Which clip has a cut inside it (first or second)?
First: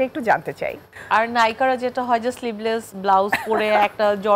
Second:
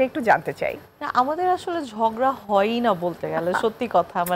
first